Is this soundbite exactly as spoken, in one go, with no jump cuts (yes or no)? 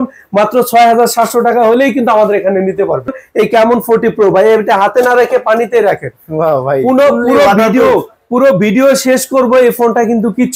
no